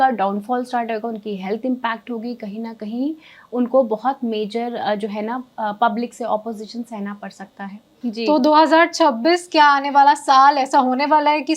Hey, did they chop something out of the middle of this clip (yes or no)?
yes